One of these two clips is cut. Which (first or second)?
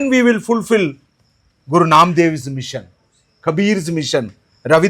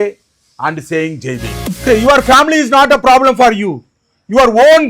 second